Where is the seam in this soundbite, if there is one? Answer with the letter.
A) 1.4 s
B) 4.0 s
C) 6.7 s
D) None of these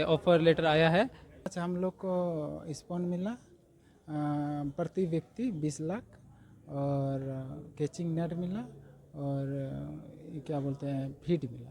A